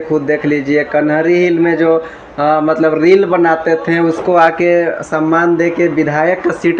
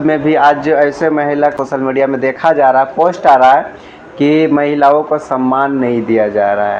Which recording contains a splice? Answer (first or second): second